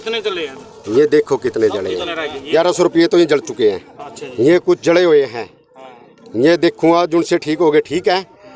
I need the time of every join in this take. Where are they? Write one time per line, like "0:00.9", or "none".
0:02.5